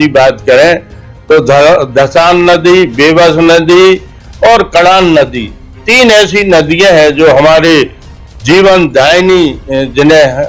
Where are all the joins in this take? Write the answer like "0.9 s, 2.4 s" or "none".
none